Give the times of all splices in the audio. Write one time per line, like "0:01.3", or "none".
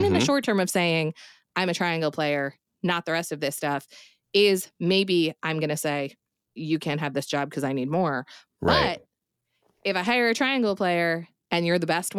0:06.4